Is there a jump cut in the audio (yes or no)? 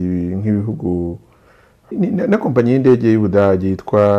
yes